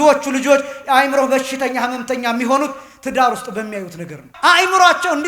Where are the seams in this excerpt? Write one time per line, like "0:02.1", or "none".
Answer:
0:04.2